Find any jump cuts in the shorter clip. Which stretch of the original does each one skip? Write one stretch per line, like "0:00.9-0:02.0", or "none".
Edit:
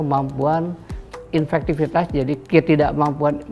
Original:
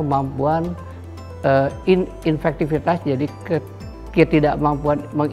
0:01.2-0:02.1
0:03.3-0:04.1